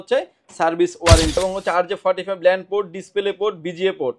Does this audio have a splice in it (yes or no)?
yes